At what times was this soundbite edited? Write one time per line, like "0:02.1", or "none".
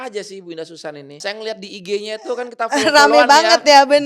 0:01.2